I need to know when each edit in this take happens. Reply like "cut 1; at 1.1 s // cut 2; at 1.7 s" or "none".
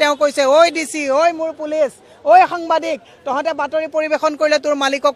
none